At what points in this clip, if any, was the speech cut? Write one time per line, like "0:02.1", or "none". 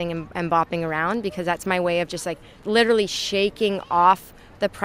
0:02.6